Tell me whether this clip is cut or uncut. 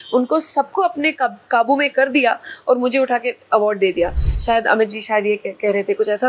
uncut